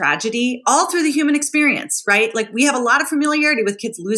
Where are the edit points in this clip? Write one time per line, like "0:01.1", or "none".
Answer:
none